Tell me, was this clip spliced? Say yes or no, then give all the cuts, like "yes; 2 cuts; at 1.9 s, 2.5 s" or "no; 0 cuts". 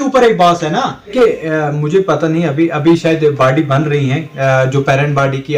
yes; 1 cut; at 1.1 s